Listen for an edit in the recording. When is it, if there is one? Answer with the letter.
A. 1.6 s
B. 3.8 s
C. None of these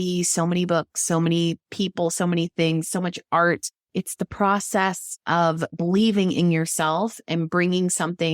B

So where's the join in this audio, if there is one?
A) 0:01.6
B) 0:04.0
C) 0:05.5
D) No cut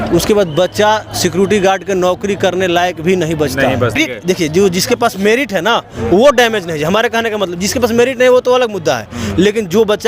B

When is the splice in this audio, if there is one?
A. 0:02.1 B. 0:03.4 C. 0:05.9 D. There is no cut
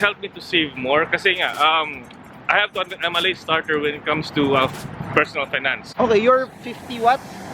D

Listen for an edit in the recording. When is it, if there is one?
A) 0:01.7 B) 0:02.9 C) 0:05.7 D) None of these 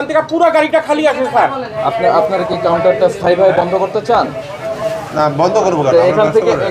A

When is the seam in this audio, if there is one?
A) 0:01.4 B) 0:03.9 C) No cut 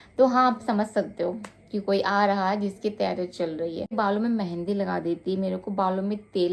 B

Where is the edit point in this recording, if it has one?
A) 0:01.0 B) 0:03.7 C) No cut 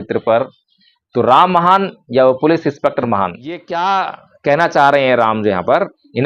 B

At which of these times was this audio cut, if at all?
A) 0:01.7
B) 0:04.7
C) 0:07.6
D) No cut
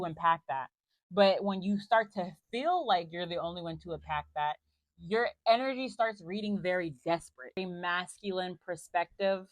C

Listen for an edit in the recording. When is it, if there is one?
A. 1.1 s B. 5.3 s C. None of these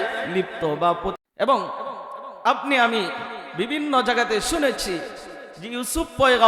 A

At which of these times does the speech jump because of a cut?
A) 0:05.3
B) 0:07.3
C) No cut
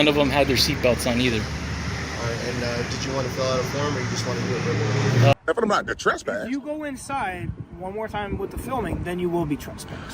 A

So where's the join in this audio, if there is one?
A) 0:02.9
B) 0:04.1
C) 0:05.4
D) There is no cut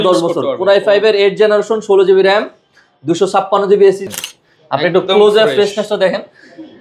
B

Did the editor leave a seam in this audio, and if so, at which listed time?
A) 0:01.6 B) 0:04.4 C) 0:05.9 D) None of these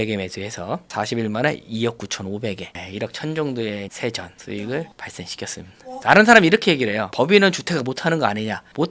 C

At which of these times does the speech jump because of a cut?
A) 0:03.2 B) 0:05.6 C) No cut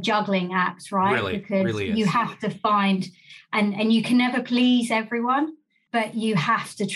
C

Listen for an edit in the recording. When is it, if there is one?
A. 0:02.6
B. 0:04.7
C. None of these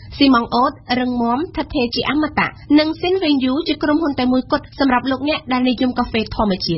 C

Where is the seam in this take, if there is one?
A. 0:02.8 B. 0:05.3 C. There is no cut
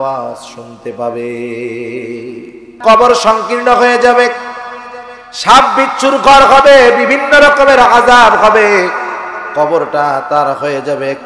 A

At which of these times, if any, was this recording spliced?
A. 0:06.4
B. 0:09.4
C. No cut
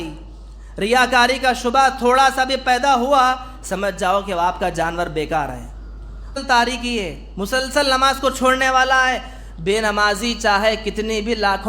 A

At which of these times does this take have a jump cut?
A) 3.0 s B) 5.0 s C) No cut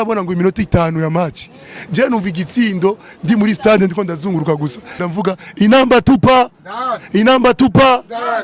B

